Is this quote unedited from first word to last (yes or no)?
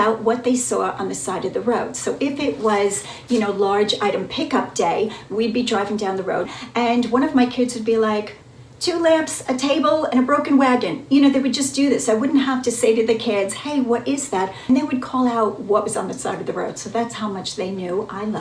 no